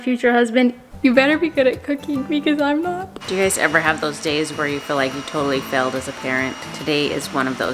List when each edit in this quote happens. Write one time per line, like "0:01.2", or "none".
0:03.2
0:06.7